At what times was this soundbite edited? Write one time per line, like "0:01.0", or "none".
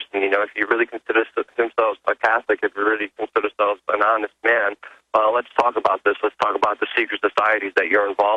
none